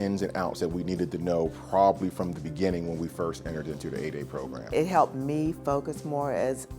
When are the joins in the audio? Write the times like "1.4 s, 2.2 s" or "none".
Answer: 4.7 s